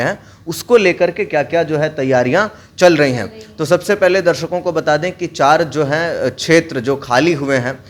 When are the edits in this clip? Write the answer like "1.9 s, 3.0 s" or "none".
none